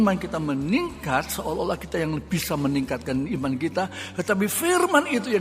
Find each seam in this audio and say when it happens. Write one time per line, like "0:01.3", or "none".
none